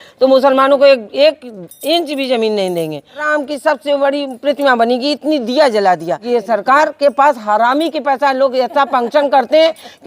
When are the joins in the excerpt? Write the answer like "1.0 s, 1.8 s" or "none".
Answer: 3.2 s, 6.2 s